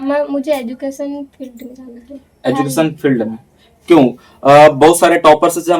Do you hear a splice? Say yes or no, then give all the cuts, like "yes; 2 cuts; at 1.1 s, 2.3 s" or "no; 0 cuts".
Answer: no; 0 cuts